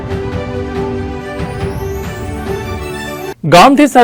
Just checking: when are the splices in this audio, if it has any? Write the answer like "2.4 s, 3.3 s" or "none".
none